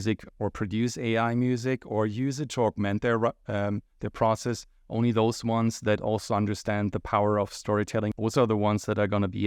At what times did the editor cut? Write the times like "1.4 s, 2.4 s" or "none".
8.1 s